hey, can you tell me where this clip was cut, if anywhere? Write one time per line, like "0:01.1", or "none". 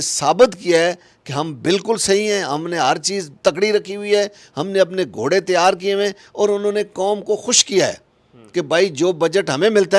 none